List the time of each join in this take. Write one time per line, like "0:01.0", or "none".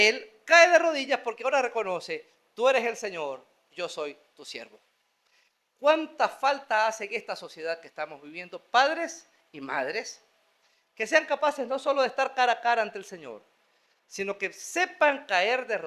none